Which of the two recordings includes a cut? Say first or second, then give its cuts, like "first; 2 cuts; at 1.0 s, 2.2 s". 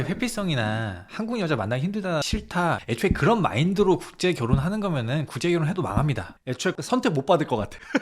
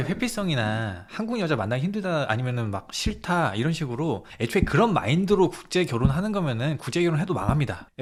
first; 2 cuts; at 2.7 s, 6.8 s